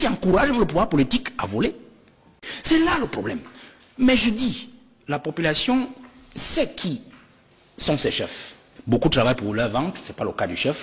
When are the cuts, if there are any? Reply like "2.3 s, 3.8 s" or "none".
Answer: 8.7 s